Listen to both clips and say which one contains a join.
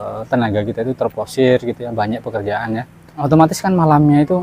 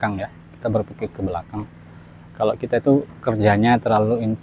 first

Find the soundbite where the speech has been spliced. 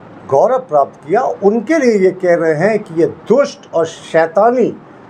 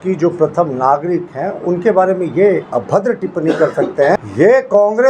second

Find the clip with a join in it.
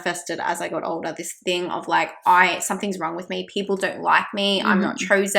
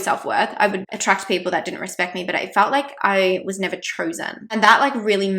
second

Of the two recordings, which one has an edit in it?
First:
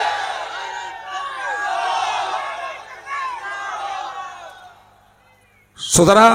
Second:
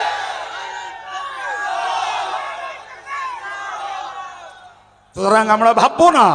second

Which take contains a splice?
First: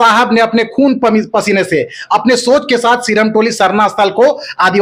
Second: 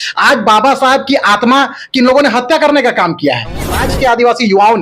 second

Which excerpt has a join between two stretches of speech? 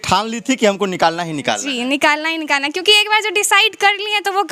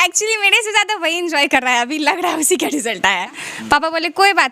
second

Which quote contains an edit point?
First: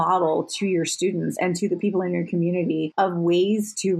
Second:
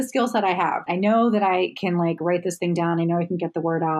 first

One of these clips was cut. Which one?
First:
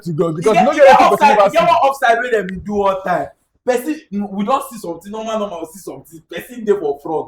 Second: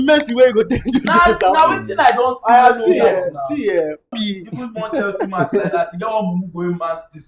second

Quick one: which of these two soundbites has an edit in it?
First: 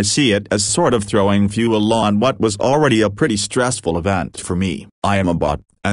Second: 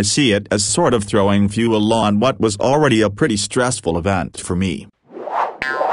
second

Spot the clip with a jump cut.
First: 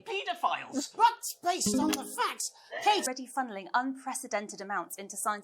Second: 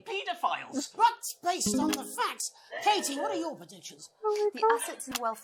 first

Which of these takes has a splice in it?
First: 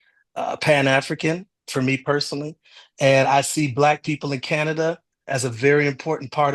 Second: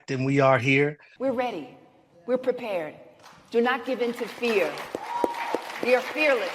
second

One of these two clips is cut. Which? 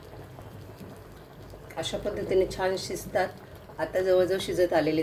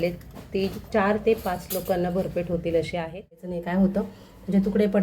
second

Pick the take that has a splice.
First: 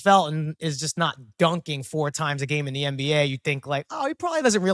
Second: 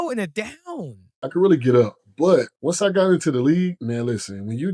second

